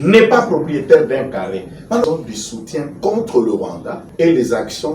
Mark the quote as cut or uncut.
cut